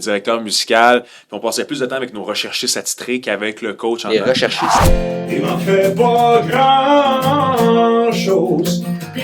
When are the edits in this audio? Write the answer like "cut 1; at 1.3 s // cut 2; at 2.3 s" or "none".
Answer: cut 1; at 4.8 s